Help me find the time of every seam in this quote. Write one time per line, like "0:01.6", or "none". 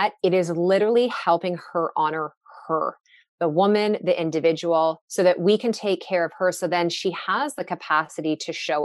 0:07.6

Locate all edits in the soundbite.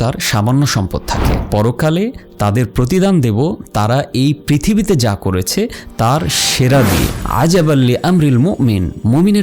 0:01.3
0:07.1

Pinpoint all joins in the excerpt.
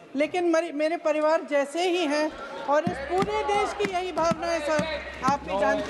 none

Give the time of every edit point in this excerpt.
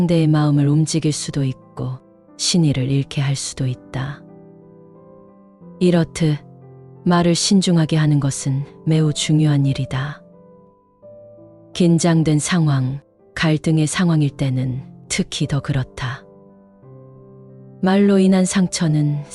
0:04.1
0:05.8

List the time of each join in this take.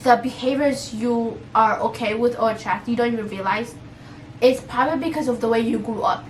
none

